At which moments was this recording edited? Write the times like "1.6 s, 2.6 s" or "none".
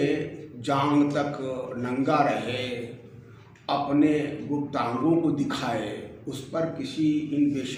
none